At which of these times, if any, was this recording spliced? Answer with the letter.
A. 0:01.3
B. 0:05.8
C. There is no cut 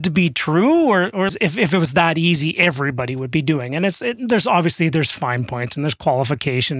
A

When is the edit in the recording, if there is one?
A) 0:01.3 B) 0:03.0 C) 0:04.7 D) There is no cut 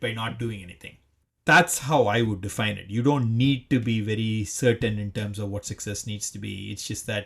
A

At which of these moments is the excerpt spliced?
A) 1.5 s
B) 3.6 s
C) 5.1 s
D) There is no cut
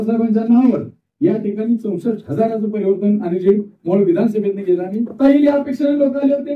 C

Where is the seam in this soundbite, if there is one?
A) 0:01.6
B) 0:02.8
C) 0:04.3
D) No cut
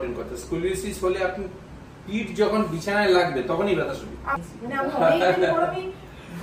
C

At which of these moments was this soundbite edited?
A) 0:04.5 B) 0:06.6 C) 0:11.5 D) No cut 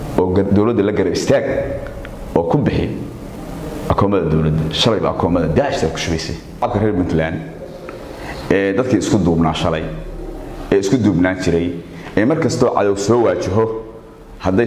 B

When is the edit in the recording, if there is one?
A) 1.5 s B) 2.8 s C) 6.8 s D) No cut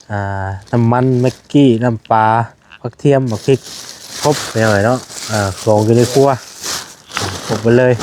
D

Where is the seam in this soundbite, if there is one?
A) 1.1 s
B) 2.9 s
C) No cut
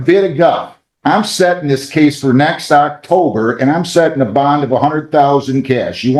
C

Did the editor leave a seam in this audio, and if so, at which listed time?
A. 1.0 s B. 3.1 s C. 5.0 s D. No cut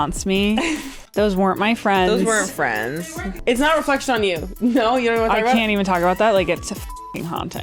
B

